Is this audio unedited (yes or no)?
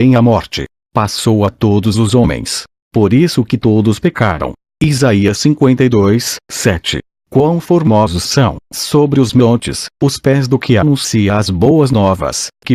yes